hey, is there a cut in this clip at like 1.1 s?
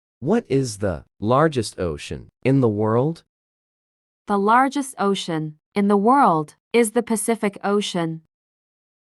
yes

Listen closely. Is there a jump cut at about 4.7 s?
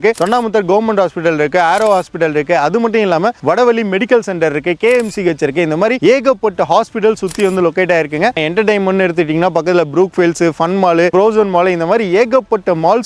no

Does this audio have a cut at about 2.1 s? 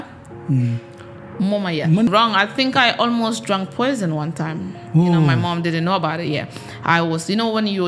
yes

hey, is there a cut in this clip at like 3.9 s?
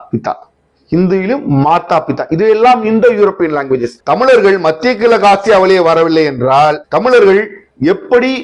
yes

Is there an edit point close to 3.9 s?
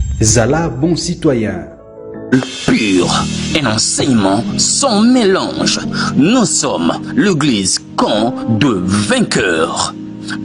no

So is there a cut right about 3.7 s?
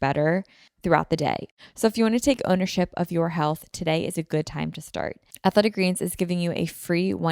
no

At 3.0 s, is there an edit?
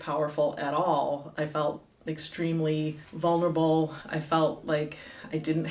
yes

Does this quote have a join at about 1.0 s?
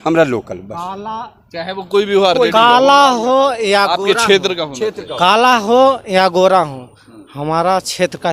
no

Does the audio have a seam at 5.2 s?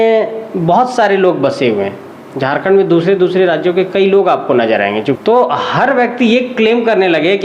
yes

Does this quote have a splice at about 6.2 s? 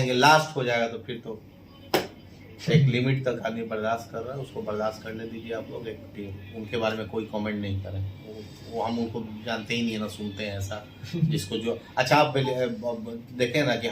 yes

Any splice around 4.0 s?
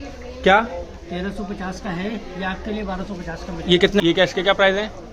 yes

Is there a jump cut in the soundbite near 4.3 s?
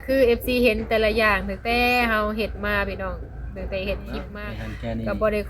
yes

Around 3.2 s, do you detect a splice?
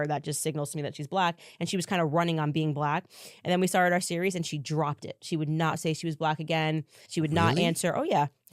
no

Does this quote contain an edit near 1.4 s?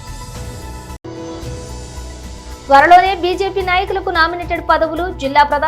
yes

